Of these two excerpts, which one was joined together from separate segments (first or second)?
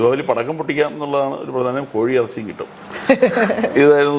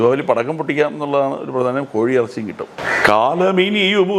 second